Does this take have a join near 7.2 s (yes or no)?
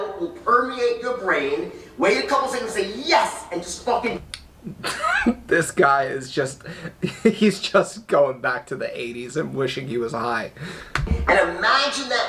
no